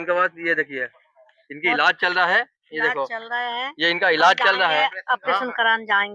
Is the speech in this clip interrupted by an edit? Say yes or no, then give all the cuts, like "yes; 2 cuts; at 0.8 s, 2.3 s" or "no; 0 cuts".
no; 0 cuts